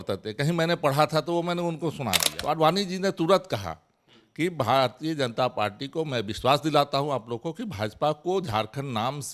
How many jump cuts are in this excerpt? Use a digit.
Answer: 1